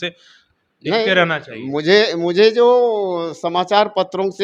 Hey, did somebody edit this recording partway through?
no; 0 cuts

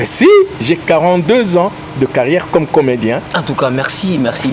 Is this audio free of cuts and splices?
yes; 0 cuts

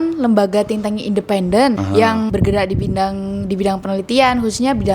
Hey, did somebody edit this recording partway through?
yes; 1 cut; at 2.1 s

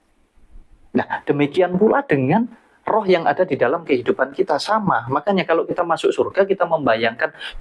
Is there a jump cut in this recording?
no; 0 cuts

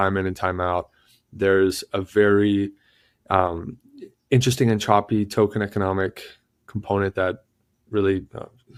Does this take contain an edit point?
no; 0 cuts

